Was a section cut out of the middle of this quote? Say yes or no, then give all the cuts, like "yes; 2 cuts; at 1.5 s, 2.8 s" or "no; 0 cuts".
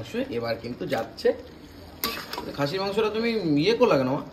no; 0 cuts